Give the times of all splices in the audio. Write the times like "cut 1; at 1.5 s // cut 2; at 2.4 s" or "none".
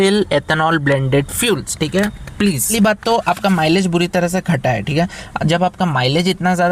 cut 1; at 2.7 s